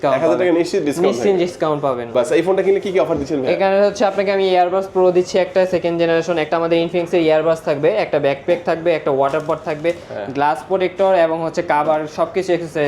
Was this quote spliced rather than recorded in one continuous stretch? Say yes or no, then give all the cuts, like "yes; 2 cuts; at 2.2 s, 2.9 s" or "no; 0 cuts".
yes; 1 cut; at 2.1 s